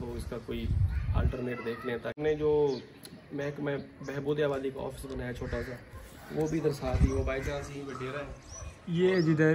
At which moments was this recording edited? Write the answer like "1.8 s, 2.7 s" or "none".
2.2 s